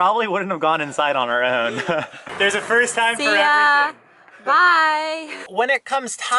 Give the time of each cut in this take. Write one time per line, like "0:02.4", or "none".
0:02.2
0:05.4